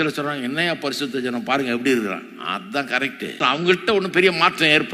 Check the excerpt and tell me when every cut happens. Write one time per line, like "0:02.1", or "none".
0:03.4